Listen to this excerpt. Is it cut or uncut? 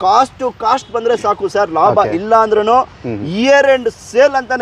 uncut